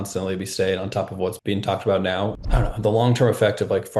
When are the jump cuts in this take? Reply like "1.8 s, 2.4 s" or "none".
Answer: 1.4 s, 2.4 s